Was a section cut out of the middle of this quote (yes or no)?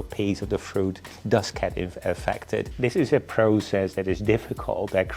yes